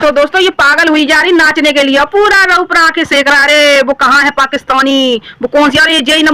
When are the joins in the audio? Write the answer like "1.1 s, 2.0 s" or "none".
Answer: none